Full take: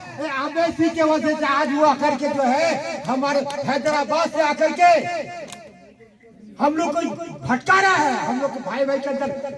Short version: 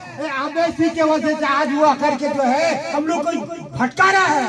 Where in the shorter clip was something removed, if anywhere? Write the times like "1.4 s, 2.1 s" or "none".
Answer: 2.9 s